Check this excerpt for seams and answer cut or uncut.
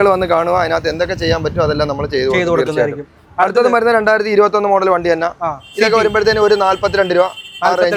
uncut